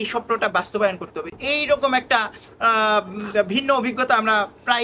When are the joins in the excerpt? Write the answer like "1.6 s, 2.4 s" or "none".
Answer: none